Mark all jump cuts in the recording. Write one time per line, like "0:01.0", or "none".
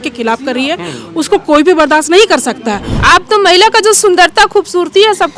0:02.9